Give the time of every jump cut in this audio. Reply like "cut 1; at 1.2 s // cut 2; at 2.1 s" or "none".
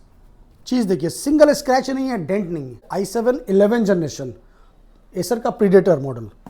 cut 1; at 2.8 s